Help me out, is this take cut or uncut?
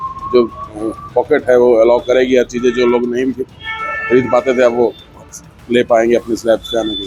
uncut